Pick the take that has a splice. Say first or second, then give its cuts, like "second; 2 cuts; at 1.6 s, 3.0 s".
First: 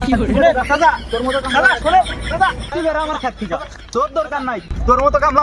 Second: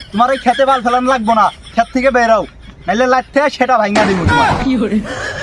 second; 1 cut; at 4.2 s